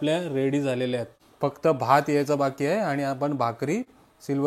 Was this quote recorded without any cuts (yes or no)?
no